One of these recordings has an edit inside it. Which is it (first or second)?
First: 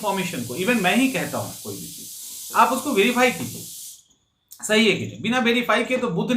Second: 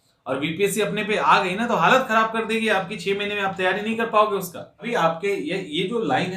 second